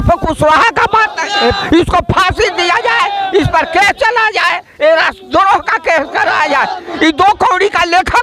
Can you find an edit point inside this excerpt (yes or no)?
yes